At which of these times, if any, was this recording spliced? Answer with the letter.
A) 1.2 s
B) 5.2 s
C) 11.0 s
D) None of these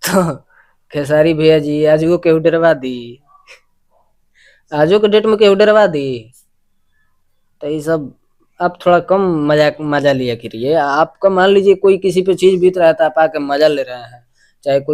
D